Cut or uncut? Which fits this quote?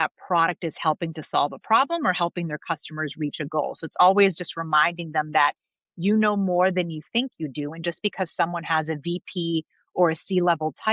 uncut